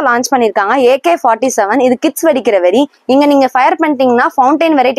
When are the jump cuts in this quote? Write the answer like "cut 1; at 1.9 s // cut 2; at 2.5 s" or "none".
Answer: none